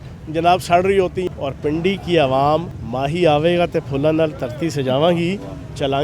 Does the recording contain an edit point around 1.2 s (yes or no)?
yes